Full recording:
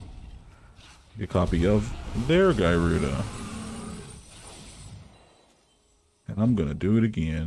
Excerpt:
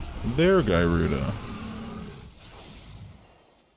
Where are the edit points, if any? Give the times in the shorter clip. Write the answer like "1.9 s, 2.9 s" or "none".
none